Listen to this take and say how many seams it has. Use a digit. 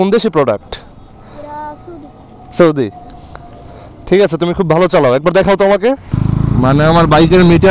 1